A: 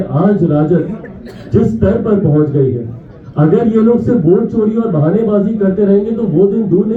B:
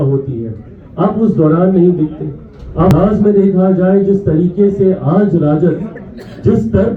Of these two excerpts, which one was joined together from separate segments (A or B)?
B